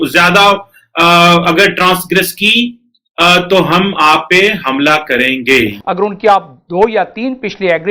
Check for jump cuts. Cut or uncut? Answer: cut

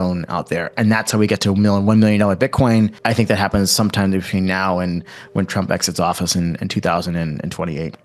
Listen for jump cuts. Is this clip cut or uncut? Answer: cut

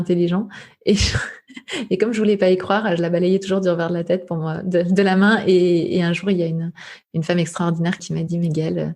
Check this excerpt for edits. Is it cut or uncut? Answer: cut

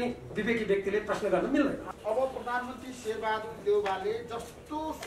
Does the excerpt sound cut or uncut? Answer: cut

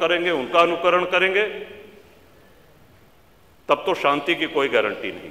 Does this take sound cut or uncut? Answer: uncut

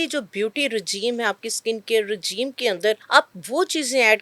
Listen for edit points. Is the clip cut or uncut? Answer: cut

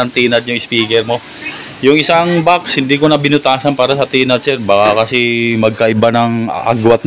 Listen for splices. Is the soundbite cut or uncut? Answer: uncut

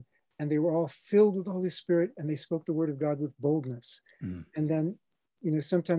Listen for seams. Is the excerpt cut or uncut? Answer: uncut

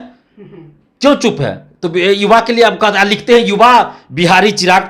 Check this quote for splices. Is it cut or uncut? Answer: uncut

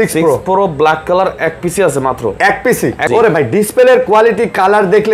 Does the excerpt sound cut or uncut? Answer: cut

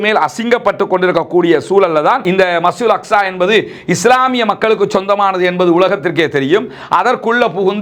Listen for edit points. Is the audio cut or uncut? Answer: cut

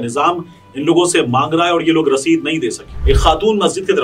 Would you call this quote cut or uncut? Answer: cut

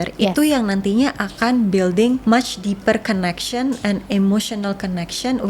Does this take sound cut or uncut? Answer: cut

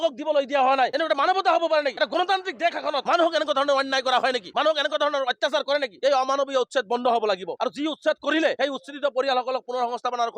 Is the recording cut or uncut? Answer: cut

